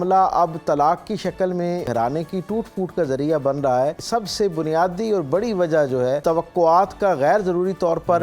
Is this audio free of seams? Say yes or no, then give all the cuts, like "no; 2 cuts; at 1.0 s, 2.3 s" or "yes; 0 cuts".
no; 3 cuts; at 1.9 s, 4.0 s, 6.2 s